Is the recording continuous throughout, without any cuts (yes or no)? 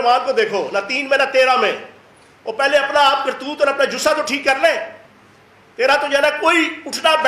yes